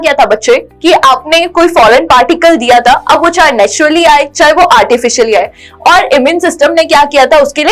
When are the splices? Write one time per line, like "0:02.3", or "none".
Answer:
none